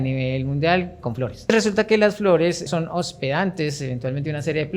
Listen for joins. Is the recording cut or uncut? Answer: cut